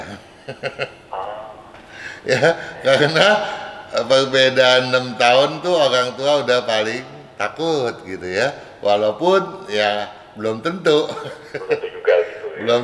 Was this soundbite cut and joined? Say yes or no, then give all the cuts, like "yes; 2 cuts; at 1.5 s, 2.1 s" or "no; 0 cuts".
no; 0 cuts